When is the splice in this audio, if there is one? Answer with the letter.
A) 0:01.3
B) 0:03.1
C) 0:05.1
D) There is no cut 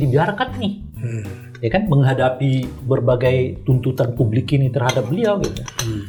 D